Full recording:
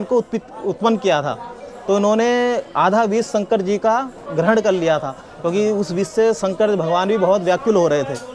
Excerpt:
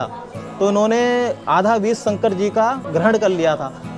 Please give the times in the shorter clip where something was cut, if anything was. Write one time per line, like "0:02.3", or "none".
0:02.8